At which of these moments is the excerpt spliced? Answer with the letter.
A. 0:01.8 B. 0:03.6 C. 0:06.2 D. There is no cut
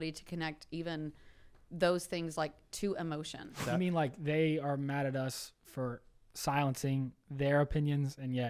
B